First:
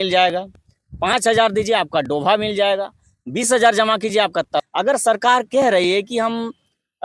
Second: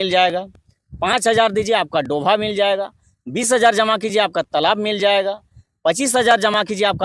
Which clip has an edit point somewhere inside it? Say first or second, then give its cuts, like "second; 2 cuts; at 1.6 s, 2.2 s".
first; 1 cut; at 4.6 s